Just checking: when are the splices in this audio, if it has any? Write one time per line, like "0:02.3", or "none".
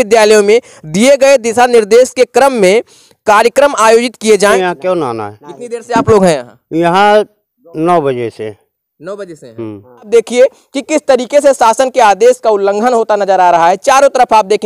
0:04.5
0:10.1